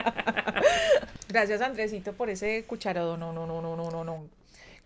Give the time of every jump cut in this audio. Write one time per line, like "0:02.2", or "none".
0:01.1